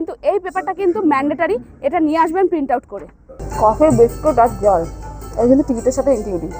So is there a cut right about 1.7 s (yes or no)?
no